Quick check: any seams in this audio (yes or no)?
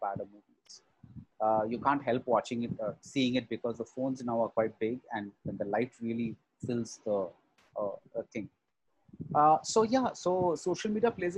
no